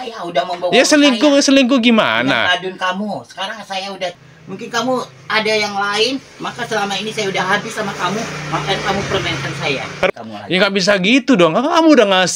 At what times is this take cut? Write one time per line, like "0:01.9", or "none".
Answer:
0:04.2
0:10.1